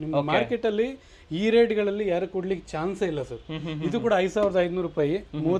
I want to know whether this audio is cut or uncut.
uncut